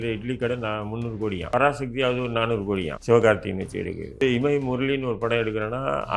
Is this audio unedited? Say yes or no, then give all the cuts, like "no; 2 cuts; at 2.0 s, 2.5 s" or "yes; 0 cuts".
no; 3 cuts; at 1.5 s, 2.9 s, 4.2 s